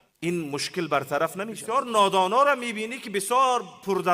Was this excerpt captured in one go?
no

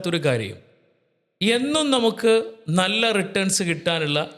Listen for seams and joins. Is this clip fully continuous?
yes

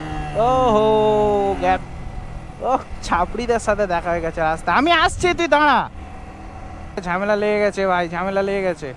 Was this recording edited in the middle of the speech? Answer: yes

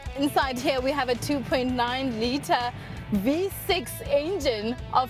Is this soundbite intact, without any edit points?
yes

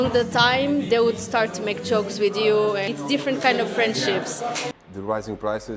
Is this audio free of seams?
no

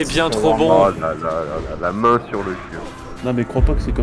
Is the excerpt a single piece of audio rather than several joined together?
yes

